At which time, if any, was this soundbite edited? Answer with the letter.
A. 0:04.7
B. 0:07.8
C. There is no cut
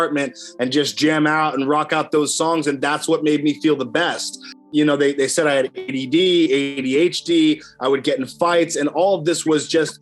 A